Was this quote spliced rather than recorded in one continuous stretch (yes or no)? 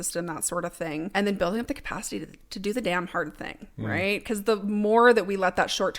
yes